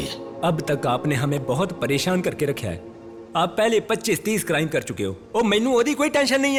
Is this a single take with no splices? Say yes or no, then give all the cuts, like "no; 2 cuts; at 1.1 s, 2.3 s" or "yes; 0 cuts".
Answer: yes; 0 cuts